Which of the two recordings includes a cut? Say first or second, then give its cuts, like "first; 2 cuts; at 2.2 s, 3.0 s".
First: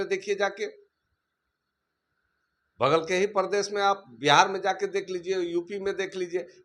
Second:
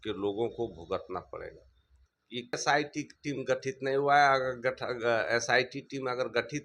second; 1 cut; at 2.6 s